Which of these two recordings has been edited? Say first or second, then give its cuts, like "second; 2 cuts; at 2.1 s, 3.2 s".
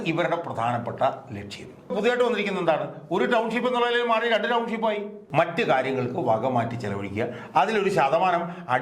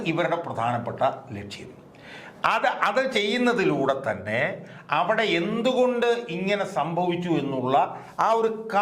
first; 2 cuts; at 1.9 s, 5.2 s